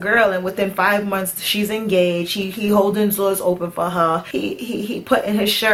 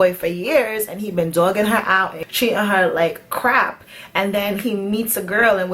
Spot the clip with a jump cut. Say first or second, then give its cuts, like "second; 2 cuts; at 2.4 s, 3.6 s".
second; 1 cut; at 2.2 s